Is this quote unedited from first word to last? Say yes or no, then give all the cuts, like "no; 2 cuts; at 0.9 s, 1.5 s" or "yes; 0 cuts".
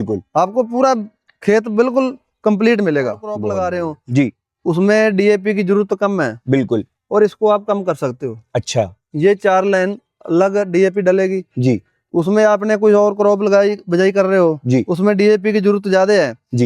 no; 1 cut; at 3.4 s